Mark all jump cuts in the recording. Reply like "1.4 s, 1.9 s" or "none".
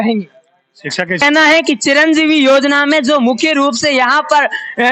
1.2 s